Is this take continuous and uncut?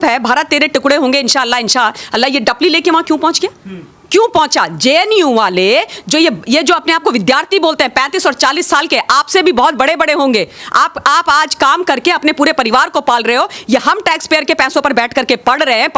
yes; 0 cuts

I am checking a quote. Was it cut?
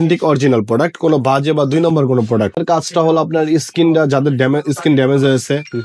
yes; 1 cut; at 2.6 s

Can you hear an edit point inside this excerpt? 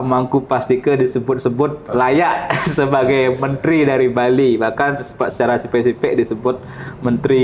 no; 0 cuts

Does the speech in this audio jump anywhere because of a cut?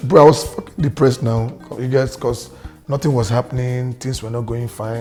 no; 0 cuts

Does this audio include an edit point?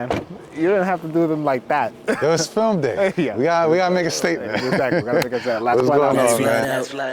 no; 0 cuts

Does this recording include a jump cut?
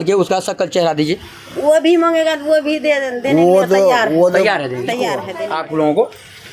yes; 1 cut; at 5.2 s

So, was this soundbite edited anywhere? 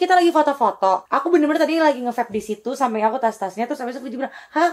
yes; 1 cut; at 1.1 s

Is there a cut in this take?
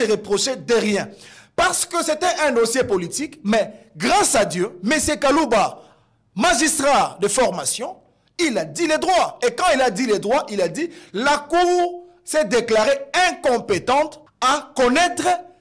yes; 1 cut; at 14.2 s

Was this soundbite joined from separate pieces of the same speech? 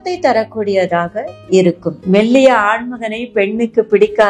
yes; 1 cut; at 1.9 s

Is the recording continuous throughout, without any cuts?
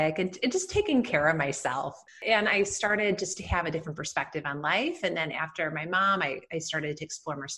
no; 1 cut; at 2.1 s

